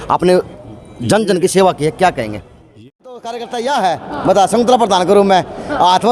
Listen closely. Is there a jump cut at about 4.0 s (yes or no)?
no